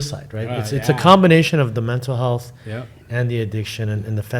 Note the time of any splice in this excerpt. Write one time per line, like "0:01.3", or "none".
none